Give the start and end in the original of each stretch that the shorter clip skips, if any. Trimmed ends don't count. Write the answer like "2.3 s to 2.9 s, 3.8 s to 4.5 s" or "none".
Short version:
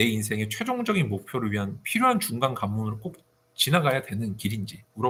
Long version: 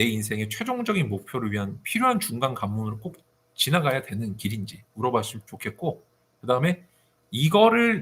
none